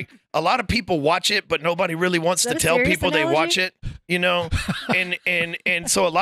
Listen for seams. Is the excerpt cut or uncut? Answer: uncut